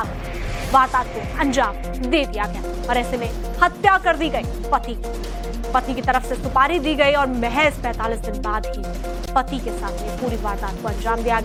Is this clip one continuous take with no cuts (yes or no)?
yes